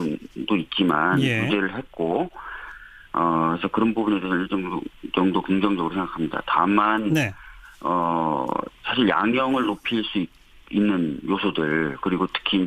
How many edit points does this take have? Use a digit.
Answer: 1